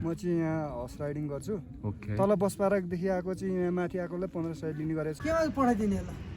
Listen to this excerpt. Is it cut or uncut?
cut